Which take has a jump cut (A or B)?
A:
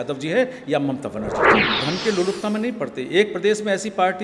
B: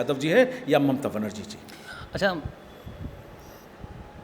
A